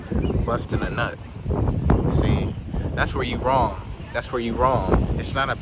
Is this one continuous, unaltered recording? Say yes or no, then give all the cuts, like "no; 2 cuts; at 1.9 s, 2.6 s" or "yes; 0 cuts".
no; 2 cuts; at 1.5 s, 4.0 s